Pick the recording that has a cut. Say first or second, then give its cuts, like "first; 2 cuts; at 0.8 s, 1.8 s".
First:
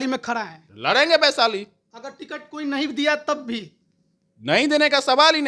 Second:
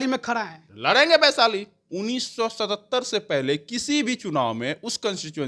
second; 1 cut; at 1.8 s